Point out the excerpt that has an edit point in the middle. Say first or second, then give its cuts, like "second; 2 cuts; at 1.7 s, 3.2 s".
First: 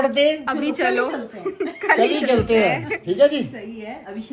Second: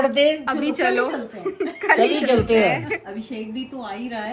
second; 1 cut; at 3.0 s